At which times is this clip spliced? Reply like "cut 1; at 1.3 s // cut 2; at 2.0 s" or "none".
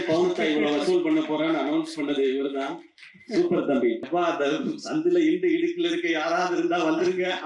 cut 1; at 4.0 s